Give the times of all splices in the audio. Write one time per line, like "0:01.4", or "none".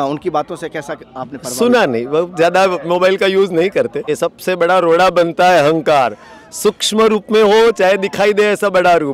0:04.1